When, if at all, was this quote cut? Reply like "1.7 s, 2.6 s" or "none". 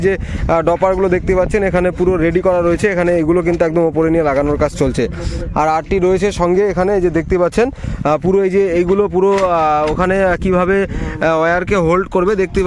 none